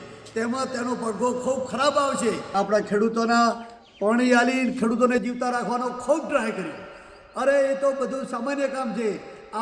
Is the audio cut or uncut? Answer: cut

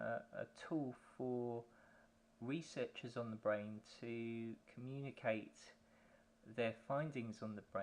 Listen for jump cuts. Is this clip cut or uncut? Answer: cut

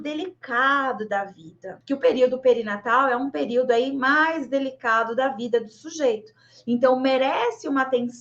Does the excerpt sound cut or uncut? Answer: cut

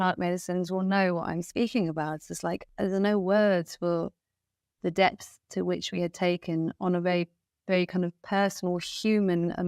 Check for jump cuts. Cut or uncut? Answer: cut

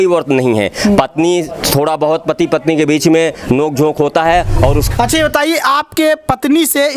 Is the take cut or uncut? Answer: cut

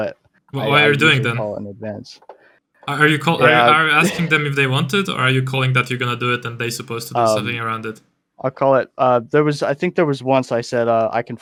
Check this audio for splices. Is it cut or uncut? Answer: uncut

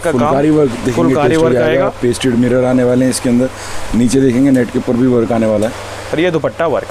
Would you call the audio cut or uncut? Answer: uncut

